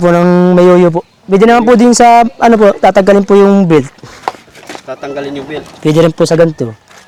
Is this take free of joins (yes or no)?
yes